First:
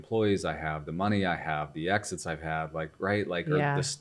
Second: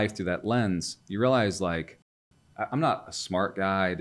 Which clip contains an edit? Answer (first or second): second